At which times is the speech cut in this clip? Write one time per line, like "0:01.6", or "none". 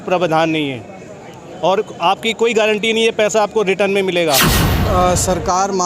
0:04.8